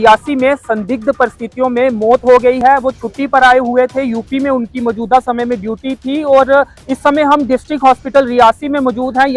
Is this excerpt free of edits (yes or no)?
yes